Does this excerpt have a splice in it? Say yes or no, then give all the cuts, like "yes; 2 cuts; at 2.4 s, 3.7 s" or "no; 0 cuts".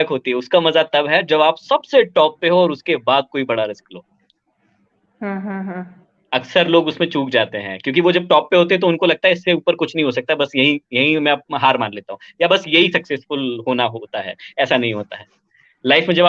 no; 0 cuts